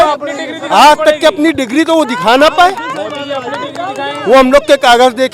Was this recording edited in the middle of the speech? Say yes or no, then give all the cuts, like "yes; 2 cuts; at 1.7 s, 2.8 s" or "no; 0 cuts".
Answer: no; 0 cuts